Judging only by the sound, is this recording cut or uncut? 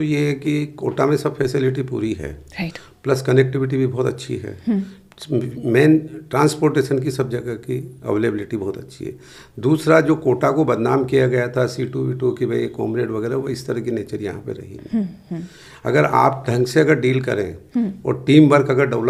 uncut